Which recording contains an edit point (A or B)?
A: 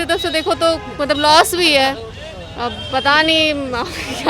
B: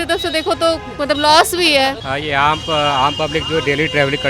B